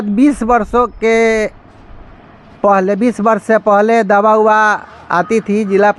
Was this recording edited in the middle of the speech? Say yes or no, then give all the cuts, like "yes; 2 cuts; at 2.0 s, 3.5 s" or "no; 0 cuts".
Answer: no; 0 cuts